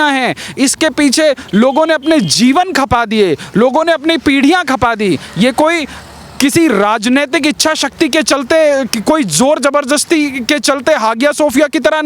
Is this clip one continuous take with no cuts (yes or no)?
yes